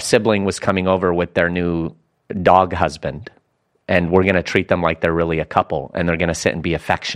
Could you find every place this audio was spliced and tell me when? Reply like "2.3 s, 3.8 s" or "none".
none